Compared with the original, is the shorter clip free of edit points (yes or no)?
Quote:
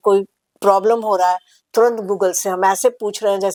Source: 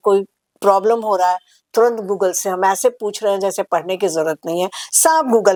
yes